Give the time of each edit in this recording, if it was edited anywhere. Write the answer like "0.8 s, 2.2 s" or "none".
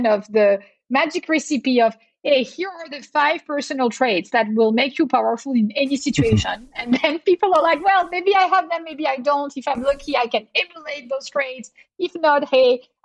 none